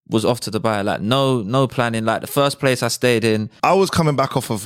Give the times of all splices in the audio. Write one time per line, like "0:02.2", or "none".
0:03.5